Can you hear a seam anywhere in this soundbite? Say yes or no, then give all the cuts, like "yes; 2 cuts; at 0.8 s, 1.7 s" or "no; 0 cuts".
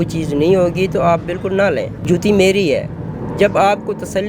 yes; 1 cut; at 2.0 s